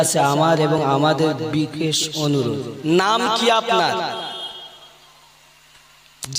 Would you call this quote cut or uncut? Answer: uncut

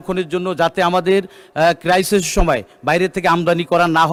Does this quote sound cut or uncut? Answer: uncut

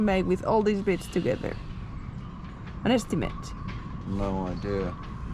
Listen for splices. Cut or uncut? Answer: uncut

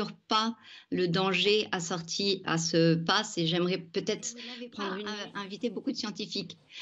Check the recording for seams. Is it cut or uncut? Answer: cut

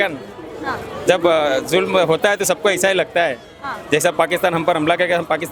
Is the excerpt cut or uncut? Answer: uncut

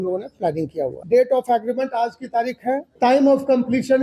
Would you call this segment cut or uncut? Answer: cut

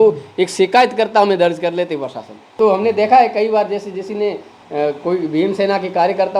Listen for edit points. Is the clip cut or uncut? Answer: cut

